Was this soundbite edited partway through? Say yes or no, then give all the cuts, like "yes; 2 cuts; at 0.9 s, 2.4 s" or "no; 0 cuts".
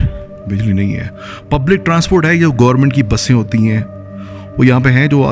no; 0 cuts